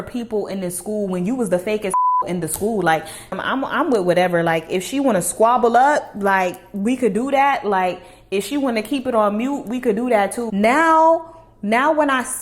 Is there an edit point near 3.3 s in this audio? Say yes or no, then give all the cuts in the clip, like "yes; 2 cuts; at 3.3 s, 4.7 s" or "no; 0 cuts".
yes; 2 cuts; at 3.3 s, 10.5 s